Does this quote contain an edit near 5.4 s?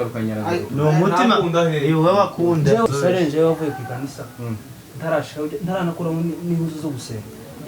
no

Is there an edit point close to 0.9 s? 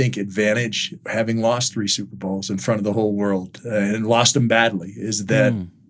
yes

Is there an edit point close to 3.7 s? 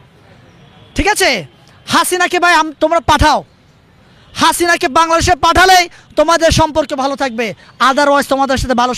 no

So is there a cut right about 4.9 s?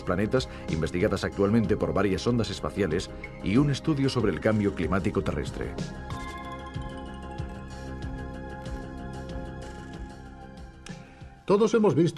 yes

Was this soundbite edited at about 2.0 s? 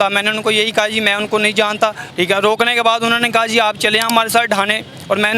yes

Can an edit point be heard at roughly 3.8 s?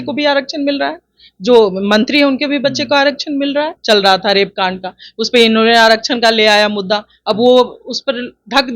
yes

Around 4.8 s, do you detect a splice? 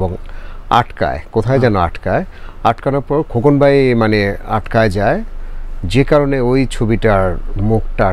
no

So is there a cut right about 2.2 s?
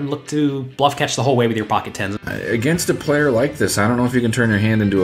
yes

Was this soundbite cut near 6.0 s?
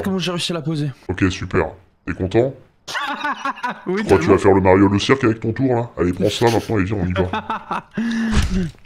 no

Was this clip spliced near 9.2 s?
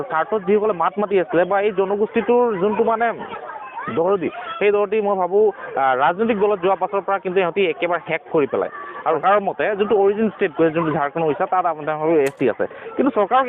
yes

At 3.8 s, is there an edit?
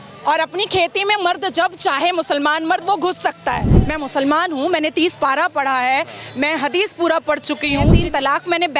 yes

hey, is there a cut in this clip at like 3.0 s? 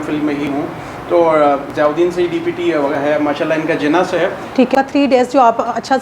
no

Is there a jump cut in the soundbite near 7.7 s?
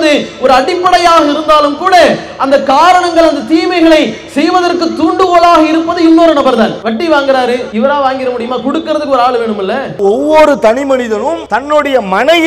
yes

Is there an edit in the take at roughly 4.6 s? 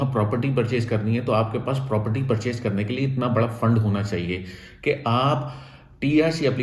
no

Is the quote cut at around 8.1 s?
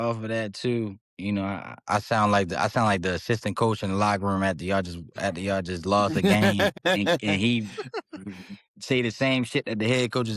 no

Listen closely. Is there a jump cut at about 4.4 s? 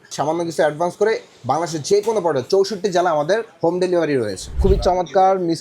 yes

